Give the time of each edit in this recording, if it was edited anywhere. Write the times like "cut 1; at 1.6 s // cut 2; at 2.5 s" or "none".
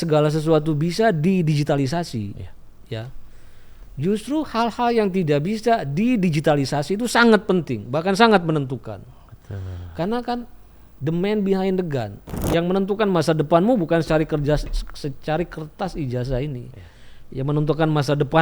cut 1; at 12.4 s